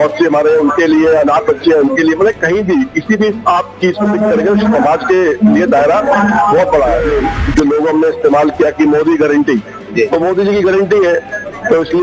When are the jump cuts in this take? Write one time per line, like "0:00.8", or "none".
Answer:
0:07.0